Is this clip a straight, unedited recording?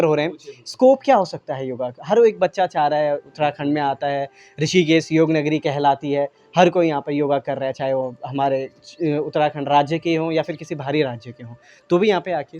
yes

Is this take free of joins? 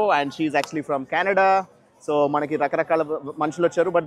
yes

